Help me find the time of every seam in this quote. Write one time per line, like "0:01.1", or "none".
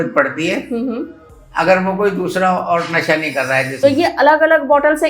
0:03.7